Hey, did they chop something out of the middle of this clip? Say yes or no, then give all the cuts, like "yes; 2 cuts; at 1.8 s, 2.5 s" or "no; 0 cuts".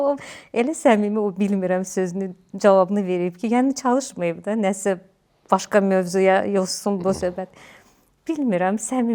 no; 0 cuts